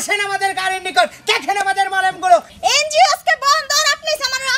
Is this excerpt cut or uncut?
cut